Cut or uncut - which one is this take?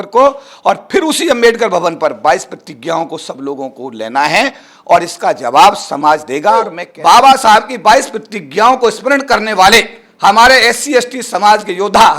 cut